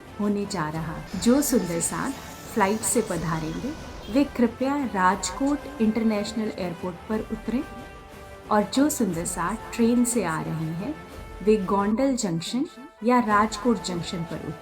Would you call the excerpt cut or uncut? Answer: cut